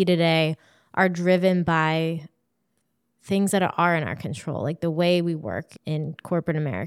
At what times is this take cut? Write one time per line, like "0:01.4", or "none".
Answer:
0:05.7